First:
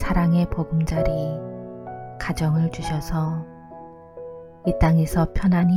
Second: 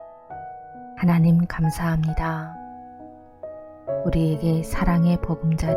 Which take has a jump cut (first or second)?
second